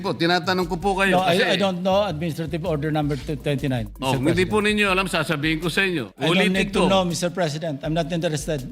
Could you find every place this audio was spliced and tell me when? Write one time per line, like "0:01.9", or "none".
0:03.9
0:06.1